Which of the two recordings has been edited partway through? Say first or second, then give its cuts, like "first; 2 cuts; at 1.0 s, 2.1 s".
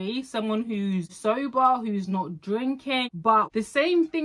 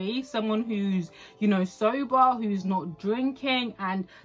first; 2 cuts; at 1.2 s, 3.3 s